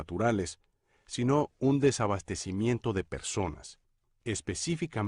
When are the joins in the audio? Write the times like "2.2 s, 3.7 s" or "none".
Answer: 3.2 s